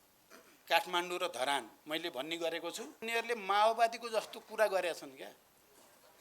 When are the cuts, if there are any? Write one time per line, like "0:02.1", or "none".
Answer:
0:03.0